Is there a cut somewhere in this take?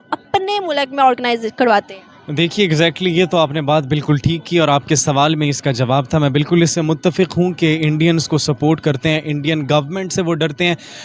no; 0 cuts

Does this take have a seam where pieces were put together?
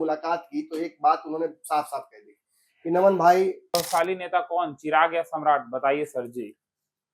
yes; 1 cut; at 3.8 s

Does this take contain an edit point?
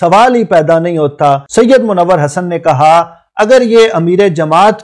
yes; 1 cut; at 1.5 s

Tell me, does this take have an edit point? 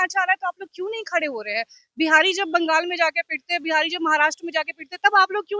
no; 0 cuts

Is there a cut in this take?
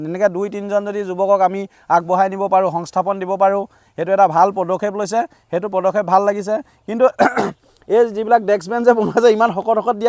no; 0 cuts

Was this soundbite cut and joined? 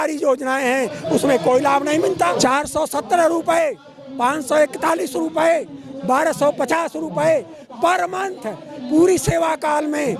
yes; 1 cut; at 2.3 s

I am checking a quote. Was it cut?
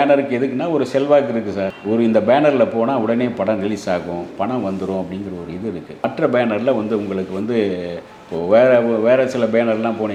no; 0 cuts

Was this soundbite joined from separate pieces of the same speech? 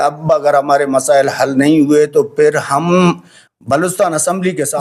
no; 0 cuts

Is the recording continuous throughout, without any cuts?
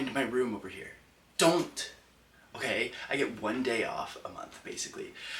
yes; 0 cuts

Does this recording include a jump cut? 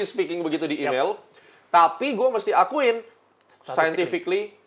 no; 0 cuts

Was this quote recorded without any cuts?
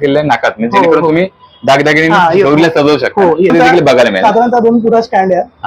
no; 1 cut; at 3.5 s

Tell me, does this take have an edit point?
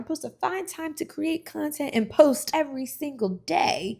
yes; 1 cut; at 2.4 s

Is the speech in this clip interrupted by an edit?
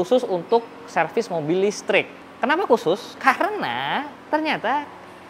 yes; 2 cuts; at 2.2 s, 4.2 s

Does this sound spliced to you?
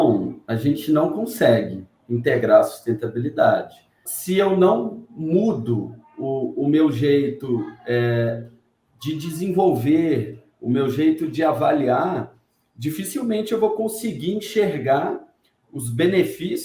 yes; 1 cut; at 4.1 s

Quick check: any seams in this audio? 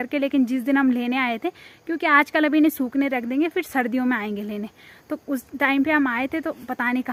no; 0 cuts

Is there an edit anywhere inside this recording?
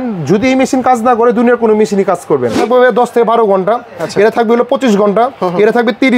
yes; 1 cut; at 2.6 s

